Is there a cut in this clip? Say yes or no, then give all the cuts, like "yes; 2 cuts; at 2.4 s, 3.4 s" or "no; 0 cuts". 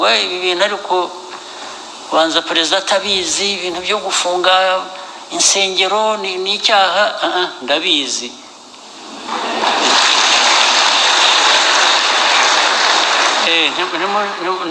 no; 0 cuts